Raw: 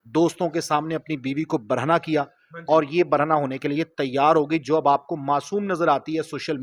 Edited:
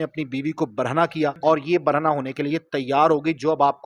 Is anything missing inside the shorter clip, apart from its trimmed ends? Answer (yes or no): yes